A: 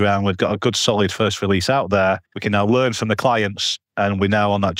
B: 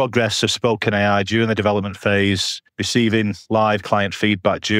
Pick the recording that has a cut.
A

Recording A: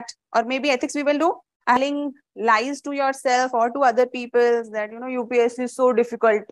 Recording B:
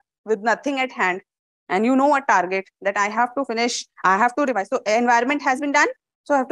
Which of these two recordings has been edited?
A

